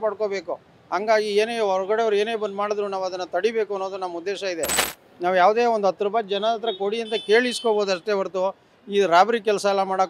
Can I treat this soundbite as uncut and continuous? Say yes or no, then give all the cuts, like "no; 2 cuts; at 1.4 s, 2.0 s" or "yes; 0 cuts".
yes; 0 cuts